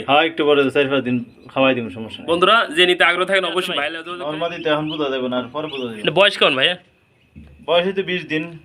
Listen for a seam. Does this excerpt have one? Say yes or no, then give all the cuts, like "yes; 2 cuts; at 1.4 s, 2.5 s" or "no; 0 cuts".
yes; 1 cut; at 3.9 s